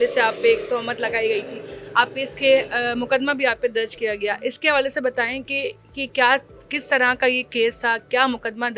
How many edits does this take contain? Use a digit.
0